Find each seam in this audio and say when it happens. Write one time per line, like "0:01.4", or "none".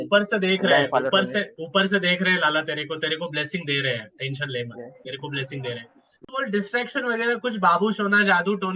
0:06.2